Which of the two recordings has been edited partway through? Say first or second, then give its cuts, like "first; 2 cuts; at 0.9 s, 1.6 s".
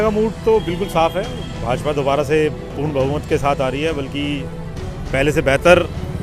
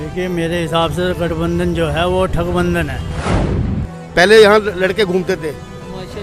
second; 1 cut; at 3.6 s